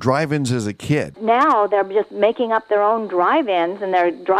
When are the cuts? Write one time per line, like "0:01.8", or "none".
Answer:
0:01.2